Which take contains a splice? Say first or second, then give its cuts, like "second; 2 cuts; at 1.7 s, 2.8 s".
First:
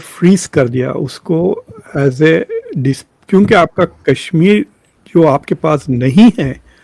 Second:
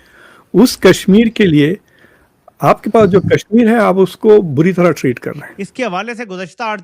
second; 1 cut; at 5.5 s